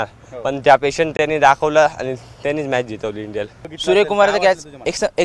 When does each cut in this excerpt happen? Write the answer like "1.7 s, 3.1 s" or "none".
3.6 s